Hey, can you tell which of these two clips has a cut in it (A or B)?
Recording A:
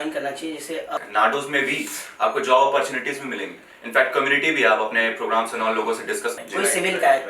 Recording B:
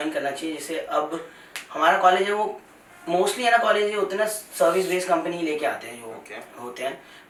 A